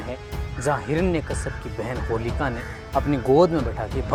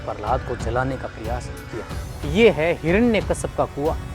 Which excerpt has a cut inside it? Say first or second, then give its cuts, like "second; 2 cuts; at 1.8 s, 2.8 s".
second; 1 cut; at 2.0 s